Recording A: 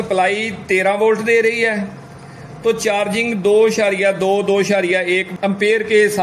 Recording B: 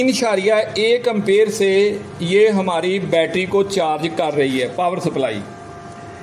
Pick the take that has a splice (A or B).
A